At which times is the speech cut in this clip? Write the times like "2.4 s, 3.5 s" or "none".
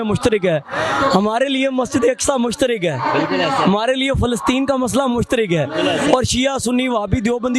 none